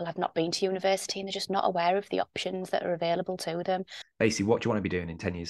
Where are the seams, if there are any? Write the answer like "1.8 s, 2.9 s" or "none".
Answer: 4.0 s